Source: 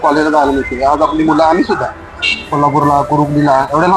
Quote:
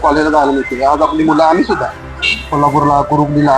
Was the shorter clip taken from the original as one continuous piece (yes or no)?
yes